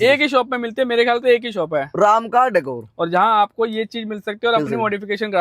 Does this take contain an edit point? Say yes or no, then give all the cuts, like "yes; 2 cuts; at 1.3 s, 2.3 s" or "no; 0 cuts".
no; 0 cuts